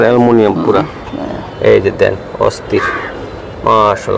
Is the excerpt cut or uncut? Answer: uncut